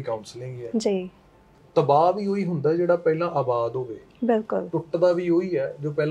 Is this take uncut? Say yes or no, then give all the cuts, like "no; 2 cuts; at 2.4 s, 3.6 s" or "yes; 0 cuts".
no; 1 cut; at 1.6 s